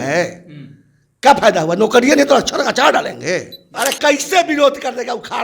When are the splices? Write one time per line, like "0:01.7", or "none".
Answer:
0:03.7